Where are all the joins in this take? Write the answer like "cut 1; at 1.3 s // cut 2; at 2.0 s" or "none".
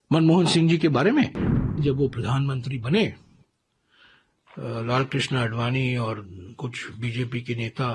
cut 1; at 1.5 s